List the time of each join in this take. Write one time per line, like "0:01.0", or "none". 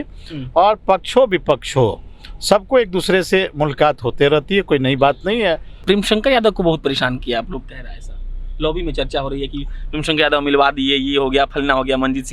0:05.8